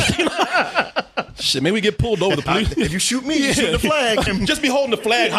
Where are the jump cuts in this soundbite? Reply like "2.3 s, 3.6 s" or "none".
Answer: 4.3 s